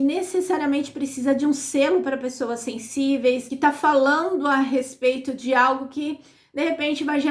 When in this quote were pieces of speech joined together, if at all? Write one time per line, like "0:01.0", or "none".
0:03.5